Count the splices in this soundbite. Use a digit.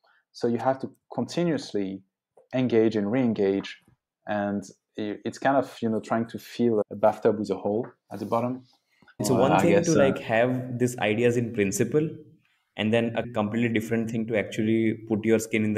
3